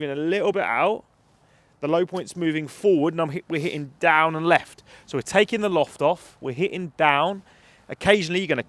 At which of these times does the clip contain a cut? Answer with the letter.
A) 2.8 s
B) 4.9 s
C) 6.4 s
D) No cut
D